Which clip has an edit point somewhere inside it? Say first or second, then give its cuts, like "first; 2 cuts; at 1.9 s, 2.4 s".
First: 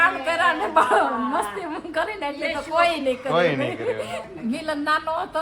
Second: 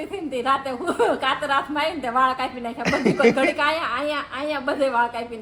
first; 1 cut; at 4.2 s